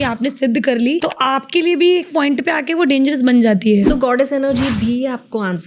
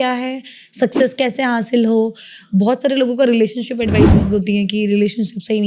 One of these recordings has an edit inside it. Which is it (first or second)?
first